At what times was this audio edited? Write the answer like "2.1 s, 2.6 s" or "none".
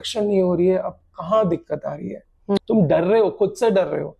2.6 s